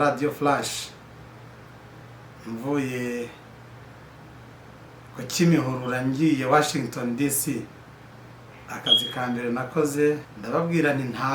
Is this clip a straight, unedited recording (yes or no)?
no